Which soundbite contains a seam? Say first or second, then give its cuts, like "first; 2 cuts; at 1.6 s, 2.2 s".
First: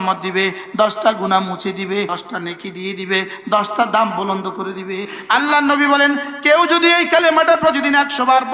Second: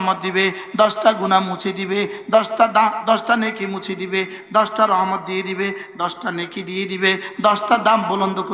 first; 2 cuts; at 2.2 s, 5.1 s